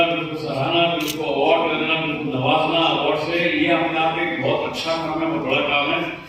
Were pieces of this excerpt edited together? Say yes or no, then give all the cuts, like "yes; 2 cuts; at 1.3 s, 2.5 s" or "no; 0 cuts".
no; 0 cuts